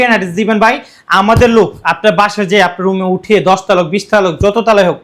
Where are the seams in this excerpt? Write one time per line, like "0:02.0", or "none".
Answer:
none